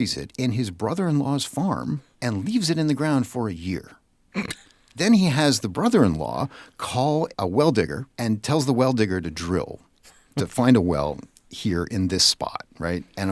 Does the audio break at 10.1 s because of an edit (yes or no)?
no